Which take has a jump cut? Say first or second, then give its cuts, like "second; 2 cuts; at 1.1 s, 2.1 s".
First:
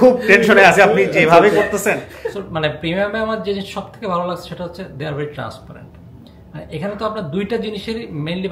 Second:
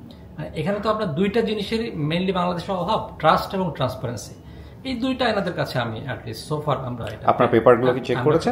first; 1 cut; at 2.1 s